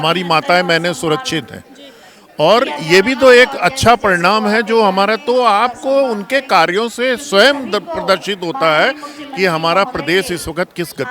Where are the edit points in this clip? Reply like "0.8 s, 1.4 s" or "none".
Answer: none